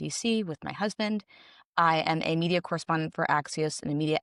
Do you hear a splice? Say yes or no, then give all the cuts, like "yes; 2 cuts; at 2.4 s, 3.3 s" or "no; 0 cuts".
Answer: no; 0 cuts